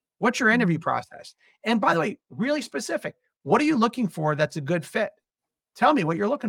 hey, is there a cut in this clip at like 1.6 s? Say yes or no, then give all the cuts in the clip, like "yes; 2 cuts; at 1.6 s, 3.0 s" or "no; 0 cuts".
no; 0 cuts